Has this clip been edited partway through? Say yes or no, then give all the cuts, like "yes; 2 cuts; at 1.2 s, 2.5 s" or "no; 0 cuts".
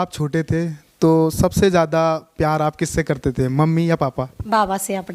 no; 0 cuts